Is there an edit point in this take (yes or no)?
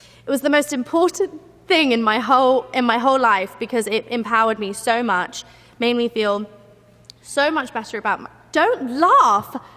no